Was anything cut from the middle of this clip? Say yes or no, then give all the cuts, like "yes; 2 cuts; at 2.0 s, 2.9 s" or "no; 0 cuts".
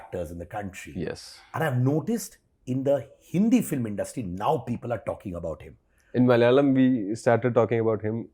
no; 0 cuts